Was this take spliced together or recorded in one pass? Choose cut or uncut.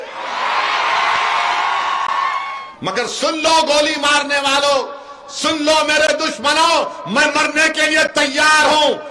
cut